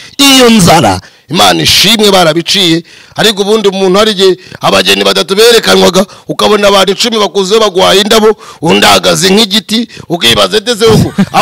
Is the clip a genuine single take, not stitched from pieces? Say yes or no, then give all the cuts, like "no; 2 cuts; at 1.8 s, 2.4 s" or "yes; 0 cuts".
no; 1 cut; at 1.1 s